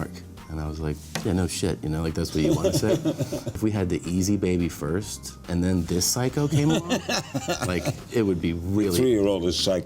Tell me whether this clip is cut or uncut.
cut